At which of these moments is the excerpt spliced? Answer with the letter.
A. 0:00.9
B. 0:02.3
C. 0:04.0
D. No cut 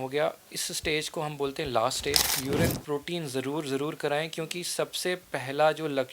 B